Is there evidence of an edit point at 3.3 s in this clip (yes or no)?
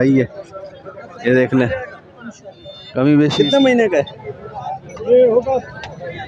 yes